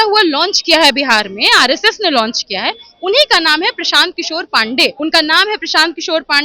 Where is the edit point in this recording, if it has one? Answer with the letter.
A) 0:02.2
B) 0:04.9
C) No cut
B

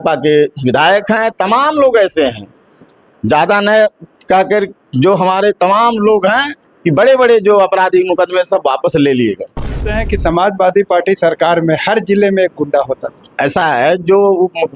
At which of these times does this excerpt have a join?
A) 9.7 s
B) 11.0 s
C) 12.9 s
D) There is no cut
A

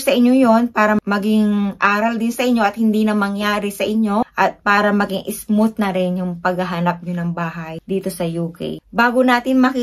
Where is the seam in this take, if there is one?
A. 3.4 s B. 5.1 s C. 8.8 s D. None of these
C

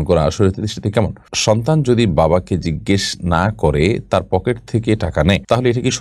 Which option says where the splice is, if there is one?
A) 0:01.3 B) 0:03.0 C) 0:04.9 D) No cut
A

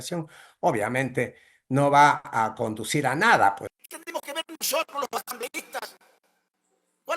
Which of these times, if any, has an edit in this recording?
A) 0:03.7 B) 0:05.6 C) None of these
A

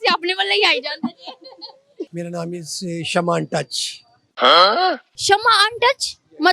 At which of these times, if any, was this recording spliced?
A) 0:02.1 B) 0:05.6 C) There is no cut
A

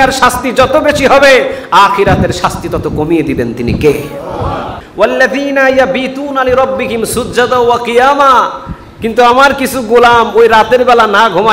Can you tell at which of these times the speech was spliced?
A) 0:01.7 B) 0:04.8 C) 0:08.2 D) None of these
B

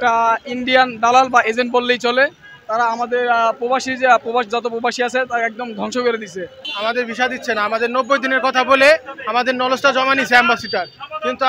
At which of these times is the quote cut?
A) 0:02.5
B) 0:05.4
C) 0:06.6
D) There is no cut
C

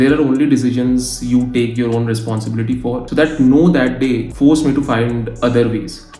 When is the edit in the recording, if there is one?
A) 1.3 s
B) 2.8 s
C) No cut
C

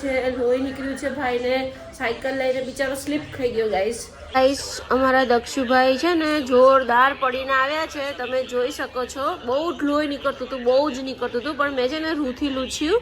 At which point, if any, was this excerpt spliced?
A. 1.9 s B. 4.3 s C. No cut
C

